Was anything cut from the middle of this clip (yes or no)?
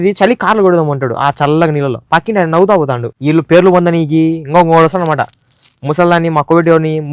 yes